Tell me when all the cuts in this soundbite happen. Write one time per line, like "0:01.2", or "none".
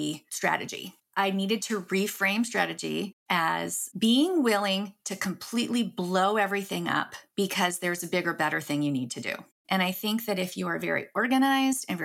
0:01.0